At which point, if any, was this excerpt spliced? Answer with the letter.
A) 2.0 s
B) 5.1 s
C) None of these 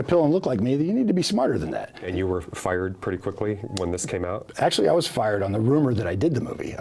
A